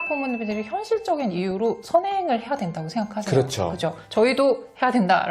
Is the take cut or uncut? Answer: uncut